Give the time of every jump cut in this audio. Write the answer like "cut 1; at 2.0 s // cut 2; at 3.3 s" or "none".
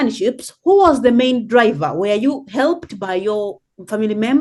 none